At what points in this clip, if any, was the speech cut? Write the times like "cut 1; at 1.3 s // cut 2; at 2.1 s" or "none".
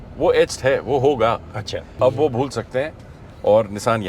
cut 1; at 1.9 s